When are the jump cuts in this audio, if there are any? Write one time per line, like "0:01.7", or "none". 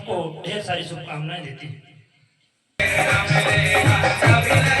0:02.8